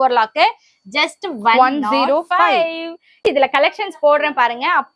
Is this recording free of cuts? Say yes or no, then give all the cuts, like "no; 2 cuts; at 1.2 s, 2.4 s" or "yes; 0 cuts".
yes; 0 cuts